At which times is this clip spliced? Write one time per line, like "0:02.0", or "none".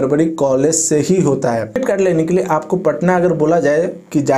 0:01.8